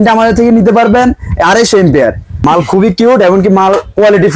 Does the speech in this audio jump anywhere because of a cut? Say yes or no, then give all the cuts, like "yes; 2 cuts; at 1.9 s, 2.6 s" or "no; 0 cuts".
yes; 1 cut; at 2.3 s